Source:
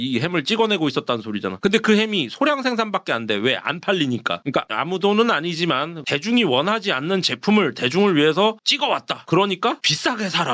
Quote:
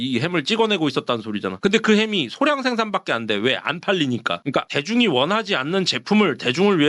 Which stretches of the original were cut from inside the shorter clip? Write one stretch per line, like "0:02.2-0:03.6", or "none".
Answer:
0:04.7-0:06.1